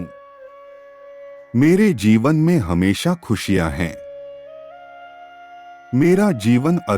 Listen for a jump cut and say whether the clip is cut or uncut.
cut